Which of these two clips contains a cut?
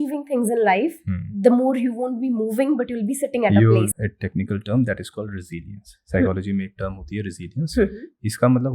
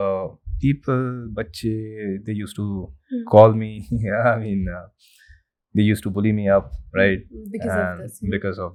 first; 1 cut; at 3.9 s

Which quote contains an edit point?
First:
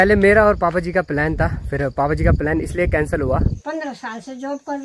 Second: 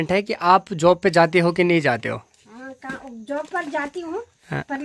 first; 1 cut; at 3.6 s

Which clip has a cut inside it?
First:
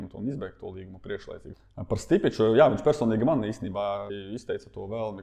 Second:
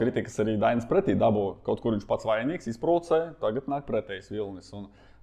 first; 2 cuts; at 1.5 s, 4.1 s

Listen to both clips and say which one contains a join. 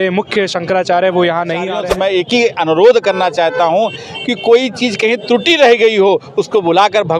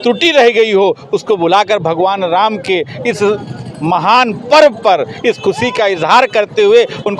first; 1 cut; at 1.8 s

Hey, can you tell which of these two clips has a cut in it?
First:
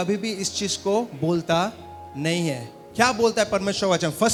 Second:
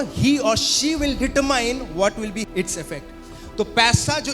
second; 1 cut; at 2.5 s

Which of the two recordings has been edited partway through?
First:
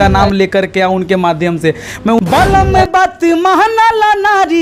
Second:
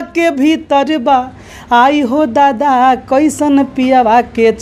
first; 1 cut; at 2.2 s

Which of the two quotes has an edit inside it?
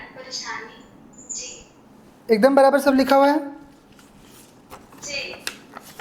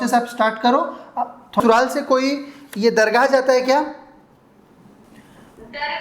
second; 1 cut; at 1.6 s

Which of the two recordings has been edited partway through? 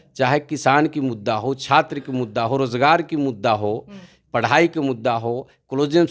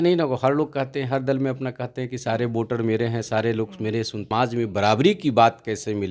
second; 1 cut; at 4.3 s

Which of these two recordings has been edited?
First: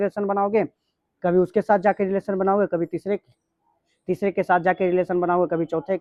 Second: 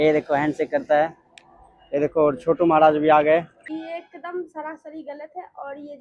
second; 1 cut; at 3.7 s

